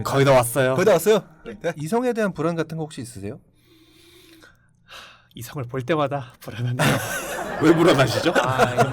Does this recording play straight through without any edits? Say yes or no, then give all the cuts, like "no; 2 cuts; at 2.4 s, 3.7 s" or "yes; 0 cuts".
no; 1 cut; at 1.7 s